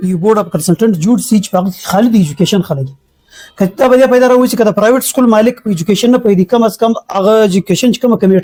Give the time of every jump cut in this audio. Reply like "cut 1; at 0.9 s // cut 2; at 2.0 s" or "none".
none